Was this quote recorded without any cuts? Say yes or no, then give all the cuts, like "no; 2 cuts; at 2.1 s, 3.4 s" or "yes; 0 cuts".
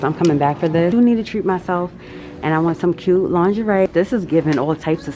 no; 2 cuts; at 0.9 s, 3.9 s